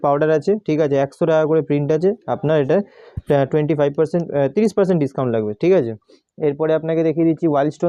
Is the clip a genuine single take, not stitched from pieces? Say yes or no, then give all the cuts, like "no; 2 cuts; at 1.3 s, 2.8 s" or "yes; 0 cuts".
yes; 0 cuts